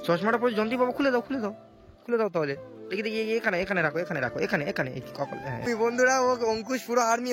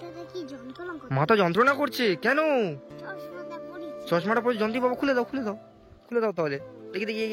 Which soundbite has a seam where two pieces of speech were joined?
first; 1 cut; at 5.6 s

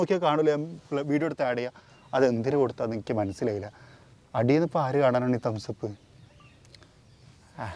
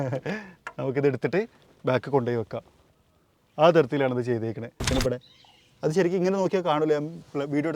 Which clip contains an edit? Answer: second; 1 cut; at 4.9 s

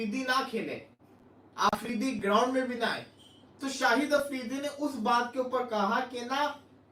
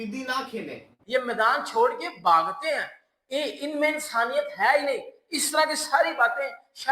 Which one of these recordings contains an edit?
second; 1 cut; at 0.9 s

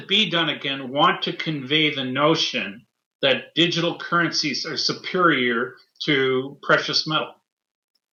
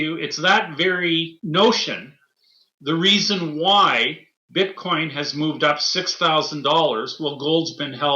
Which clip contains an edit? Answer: second; 1 cut; at 1.4 s

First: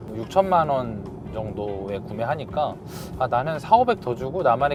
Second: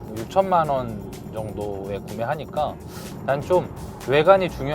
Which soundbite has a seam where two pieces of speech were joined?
second; 1 cut; at 3.1 s

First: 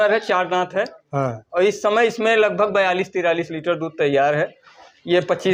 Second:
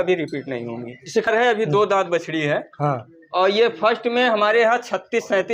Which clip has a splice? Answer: second; 1 cut; at 1.2 s

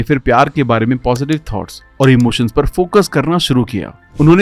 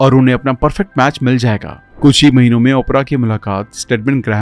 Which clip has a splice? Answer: second; 1 cut; at 1.8 s

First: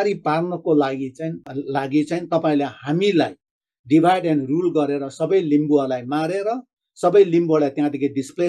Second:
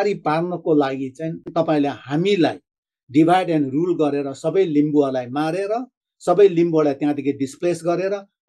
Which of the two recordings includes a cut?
second; 1 cut; at 1.5 s

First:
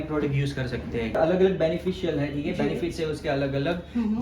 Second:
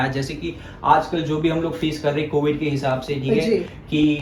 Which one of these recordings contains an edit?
first; 1 cut; at 1.1 s

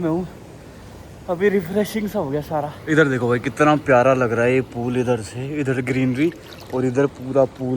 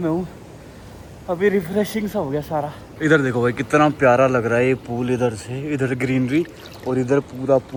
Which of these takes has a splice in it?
first; 1 cut; at 2.7 s

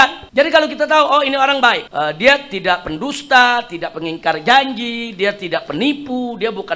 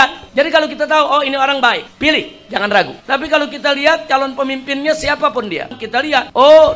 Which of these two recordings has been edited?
second; 2 cuts; at 1.9 s, 5.7 s

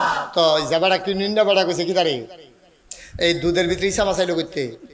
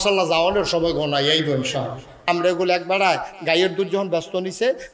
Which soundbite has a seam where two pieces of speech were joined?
second; 1 cut; at 2.1 s

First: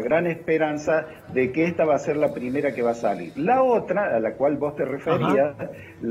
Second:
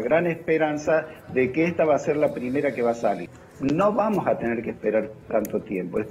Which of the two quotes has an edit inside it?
second; 1 cut; at 3.3 s

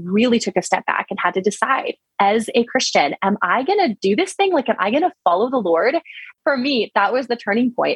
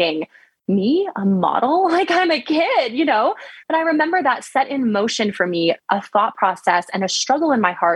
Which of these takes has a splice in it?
first; 1 cut; at 6.2 s

